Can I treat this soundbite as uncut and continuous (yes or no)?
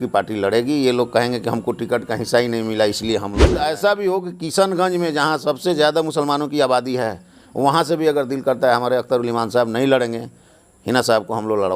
no